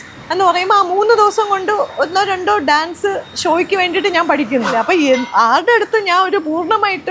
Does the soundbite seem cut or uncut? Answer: cut